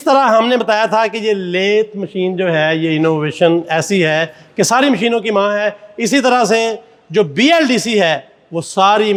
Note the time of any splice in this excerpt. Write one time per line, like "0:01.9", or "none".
none